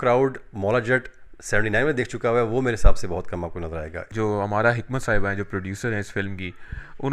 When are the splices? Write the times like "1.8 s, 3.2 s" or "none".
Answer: none